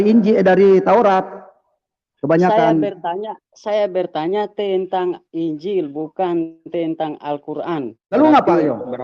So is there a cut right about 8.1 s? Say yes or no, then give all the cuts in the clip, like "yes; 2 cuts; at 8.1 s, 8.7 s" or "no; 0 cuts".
yes; 1 cut; at 8.1 s